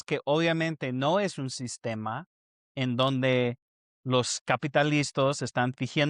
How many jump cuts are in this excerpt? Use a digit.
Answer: 0